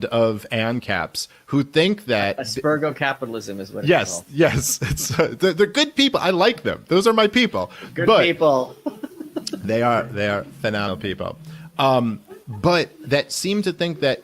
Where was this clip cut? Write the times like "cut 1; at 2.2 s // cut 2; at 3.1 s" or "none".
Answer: cut 1; at 3.9 s